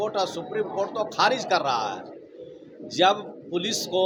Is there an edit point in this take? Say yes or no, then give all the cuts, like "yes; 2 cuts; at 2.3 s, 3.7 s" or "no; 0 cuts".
no; 0 cuts